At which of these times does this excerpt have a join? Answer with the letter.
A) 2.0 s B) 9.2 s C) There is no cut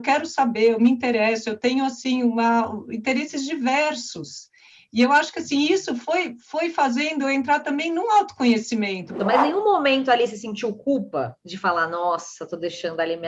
B